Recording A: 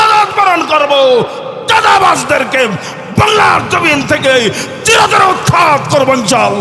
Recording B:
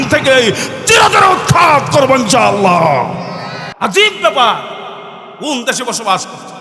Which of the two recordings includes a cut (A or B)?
B